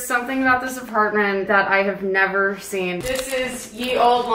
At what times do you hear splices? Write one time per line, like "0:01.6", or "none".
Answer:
0:01.4